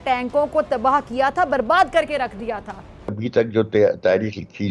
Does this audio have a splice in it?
yes; 1 cut; at 3.2 s

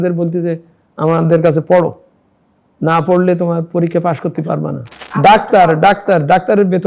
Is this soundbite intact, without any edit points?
no; 1 cut; at 5.0 s

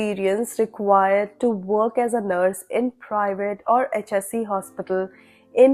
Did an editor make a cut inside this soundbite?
no; 0 cuts

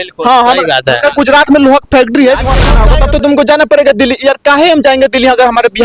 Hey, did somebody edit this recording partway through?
yes; 1 cut; at 2.7 s

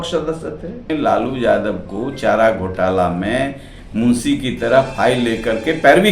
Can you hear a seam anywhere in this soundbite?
yes; 1 cut; at 0.9 s

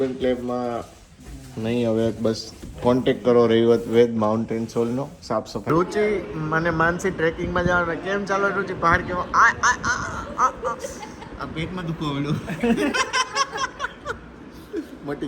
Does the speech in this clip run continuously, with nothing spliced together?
no; 1 cut; at 5.7 s

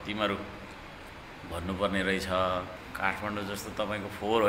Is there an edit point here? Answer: yes; 1 cut; at 2.8 s

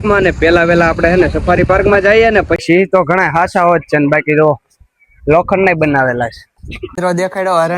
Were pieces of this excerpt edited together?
yes; 2 cuts; at 2.5 s, 6.9 s

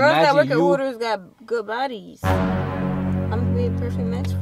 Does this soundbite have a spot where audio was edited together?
no; 0 cuts

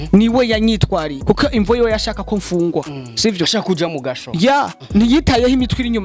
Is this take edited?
yes; 1 cut; at 1.1 s

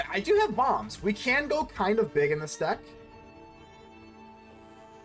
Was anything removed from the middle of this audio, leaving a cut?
no; 0 cuts

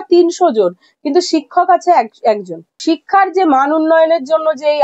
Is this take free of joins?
no; 1 cut; at 2.8 s

